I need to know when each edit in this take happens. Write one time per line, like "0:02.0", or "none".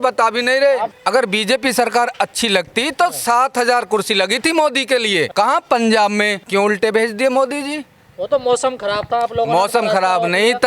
0:00.9
0:05.3
0:06.4